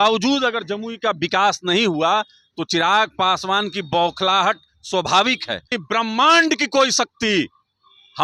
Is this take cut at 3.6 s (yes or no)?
no